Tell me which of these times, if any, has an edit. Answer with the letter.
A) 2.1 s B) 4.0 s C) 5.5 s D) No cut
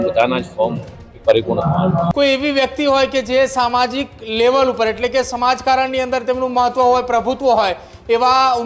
A